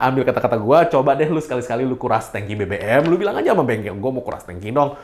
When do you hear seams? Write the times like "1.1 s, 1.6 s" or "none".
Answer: none